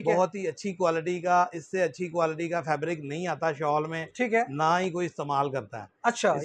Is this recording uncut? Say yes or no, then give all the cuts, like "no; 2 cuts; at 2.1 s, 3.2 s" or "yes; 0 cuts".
yes; 0 cuts